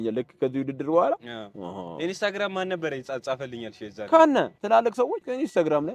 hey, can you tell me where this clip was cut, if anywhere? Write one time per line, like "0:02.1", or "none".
0:04.8